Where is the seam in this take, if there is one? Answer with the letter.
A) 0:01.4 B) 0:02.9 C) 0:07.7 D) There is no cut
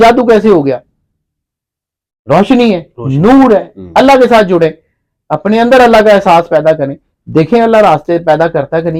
D